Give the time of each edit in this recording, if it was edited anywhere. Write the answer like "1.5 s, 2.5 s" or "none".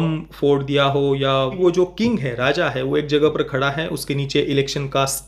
1.6 s